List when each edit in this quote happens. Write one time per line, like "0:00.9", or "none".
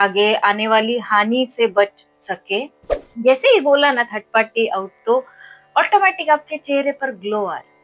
0:02.8